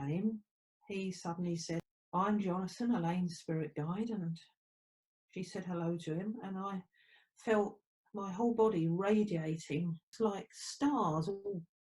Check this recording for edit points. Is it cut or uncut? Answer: cut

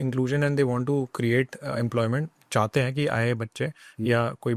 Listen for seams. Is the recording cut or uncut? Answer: uncut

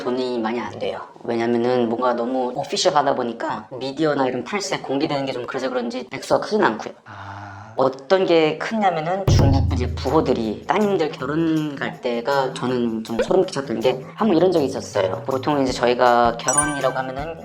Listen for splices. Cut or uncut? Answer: uncut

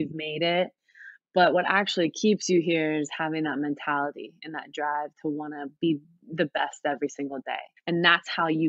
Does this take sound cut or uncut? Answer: cut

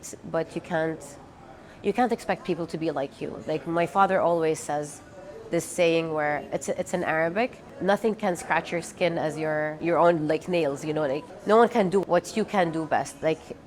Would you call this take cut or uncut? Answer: cut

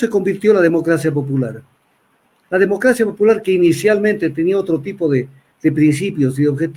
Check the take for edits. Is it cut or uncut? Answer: uncut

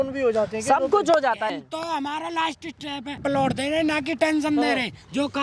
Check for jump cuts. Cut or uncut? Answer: cut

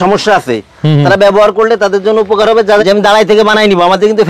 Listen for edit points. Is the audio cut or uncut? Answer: cut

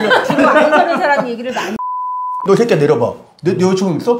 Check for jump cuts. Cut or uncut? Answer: cut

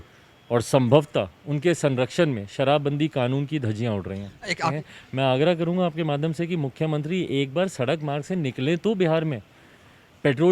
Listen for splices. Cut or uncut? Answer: cut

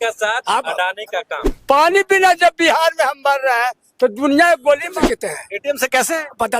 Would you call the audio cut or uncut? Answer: cut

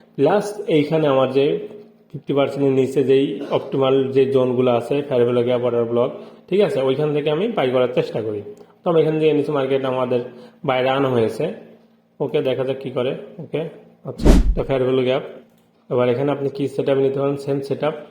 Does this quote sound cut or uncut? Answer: cut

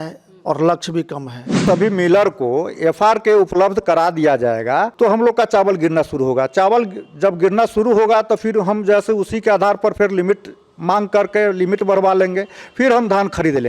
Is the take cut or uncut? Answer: cut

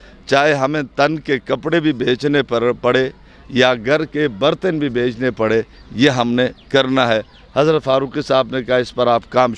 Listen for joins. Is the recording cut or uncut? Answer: uncut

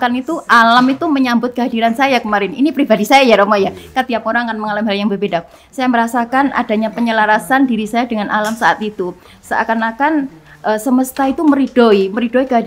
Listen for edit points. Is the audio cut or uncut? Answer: uncut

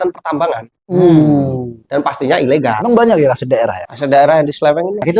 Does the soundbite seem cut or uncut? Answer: cut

